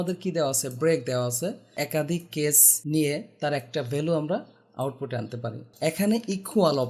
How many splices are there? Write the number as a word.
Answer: three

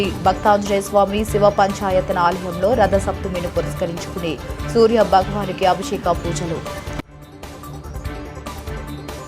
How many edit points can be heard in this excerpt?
one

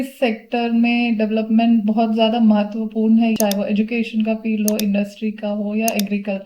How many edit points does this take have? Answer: one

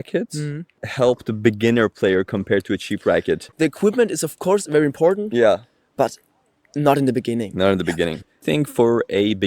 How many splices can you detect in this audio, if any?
two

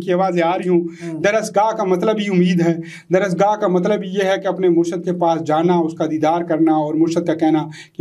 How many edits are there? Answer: zero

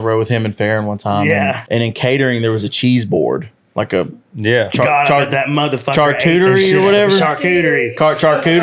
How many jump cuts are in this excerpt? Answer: one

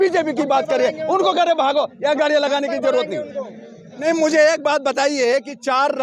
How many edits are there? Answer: one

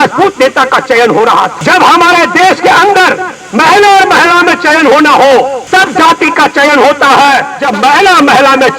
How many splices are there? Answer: three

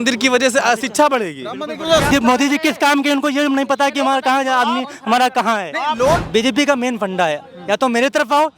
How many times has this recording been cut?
two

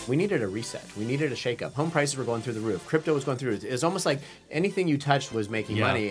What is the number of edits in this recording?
two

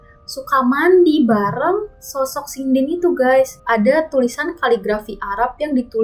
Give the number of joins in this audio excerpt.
one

